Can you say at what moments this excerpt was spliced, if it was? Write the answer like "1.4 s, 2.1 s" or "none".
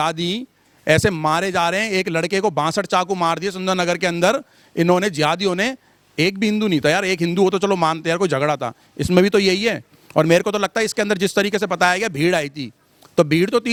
none